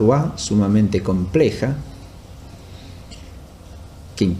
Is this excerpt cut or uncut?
cut